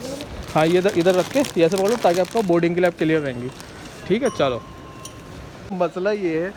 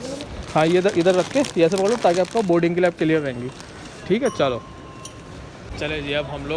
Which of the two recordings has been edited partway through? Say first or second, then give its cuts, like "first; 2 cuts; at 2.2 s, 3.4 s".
second; 1 cut; at 5.5 s